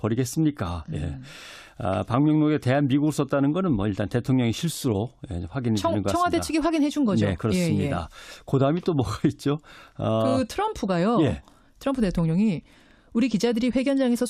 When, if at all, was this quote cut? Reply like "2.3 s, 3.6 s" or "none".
10.7 s